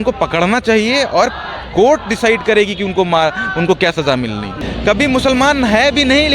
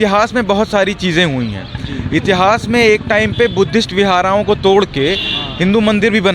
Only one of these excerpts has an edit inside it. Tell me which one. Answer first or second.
first